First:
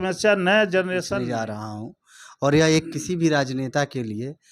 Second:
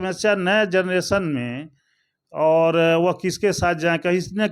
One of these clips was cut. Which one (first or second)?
first